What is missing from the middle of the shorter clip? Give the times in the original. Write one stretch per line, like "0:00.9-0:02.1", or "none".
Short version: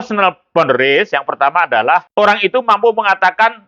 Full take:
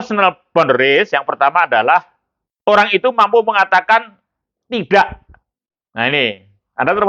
0:02.1-0:02.6